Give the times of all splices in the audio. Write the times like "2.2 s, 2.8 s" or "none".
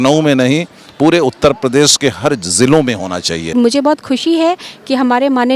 3.5 s